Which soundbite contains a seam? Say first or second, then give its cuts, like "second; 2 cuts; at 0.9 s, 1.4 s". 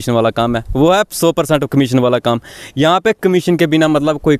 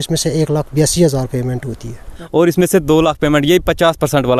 second; 1 cut; at 2.2 s